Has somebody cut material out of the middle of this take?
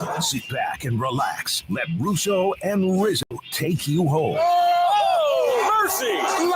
yes; 1 cut; at 3.2 s

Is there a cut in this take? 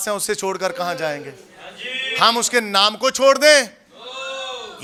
no; 0 cuts

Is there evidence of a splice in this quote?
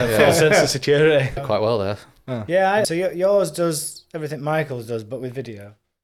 yes; 2 cuts; at 1.4 s, 2.9 s

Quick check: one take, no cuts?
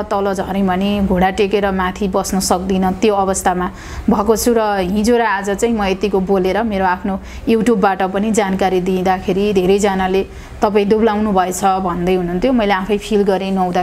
yes; 0 cuts

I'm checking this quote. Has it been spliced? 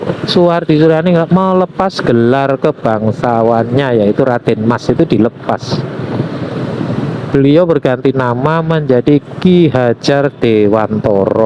no; 0 cuts

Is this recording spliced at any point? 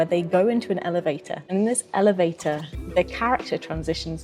yes; 2 cuts; at 1.3 s, 2.7 s

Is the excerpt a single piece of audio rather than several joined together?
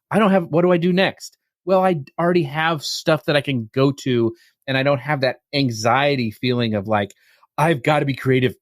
yes; 0 cuts

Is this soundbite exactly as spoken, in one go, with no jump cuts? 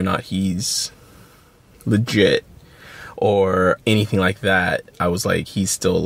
yes; 0 cuts

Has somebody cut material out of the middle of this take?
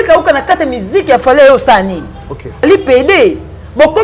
yes; 1 cut; at 2.6 s

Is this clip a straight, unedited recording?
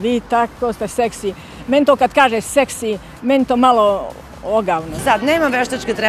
no; 1 cut; at 4.9 s

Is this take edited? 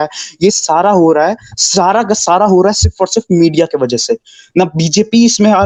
no; 0 cuts

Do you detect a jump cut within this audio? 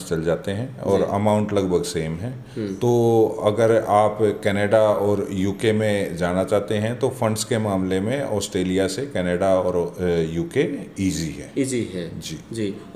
no; 0 cuts

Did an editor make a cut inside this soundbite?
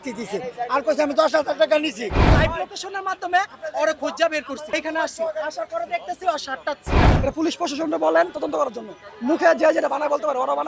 yes; 3 cuts; at 2.1 s, 4.6 s, 7.1 s

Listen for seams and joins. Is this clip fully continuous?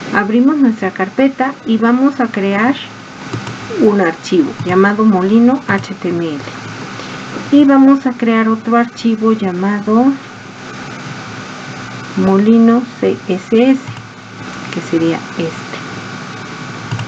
yes; 0 cuts

